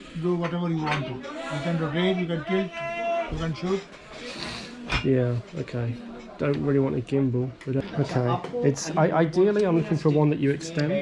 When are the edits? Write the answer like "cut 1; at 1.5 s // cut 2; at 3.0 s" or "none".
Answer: cut 1; at 7.8 s